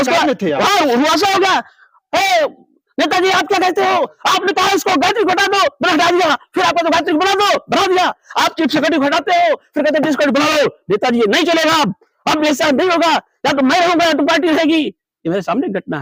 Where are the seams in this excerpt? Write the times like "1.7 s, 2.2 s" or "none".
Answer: none